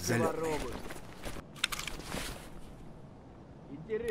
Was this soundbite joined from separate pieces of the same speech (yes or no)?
yes